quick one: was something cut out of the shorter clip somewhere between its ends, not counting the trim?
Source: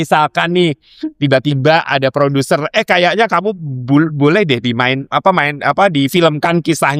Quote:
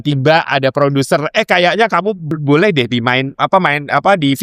yes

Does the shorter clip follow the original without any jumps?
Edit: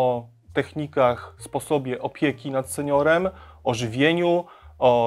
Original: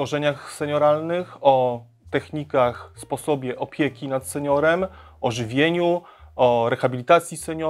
yes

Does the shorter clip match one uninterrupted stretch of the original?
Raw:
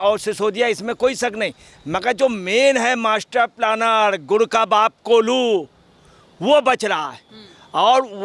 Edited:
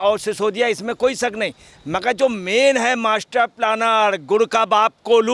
yes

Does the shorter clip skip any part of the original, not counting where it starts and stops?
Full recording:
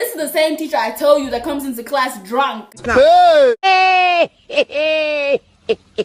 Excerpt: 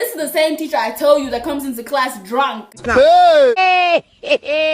yes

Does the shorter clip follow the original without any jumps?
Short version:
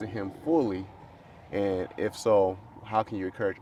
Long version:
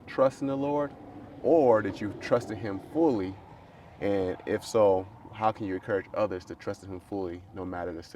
yes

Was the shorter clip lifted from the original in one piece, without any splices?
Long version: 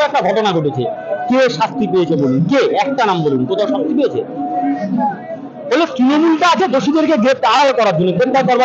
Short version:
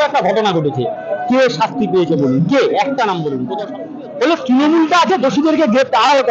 no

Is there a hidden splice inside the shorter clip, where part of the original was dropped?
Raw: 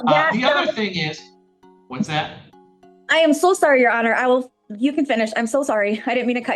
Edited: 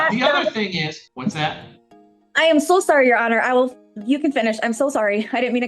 yes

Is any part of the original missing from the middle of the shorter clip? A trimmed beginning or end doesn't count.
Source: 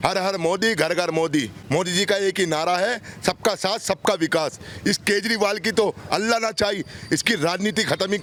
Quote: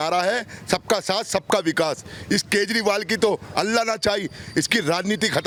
no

